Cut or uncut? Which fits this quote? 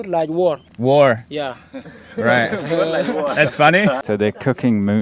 cut